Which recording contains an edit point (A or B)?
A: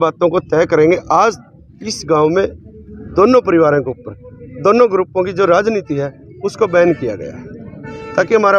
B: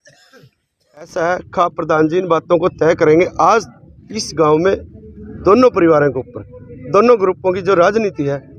B